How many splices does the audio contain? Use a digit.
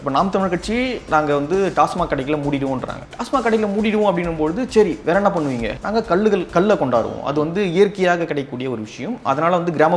1